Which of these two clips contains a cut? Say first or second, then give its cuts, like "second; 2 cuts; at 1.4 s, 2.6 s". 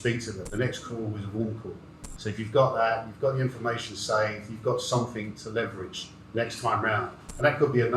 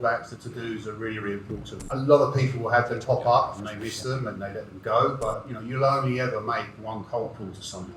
second; 1 cut; at 1.8 s